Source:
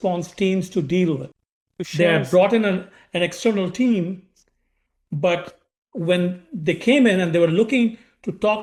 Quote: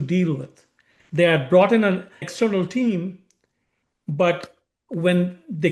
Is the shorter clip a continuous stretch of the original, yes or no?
no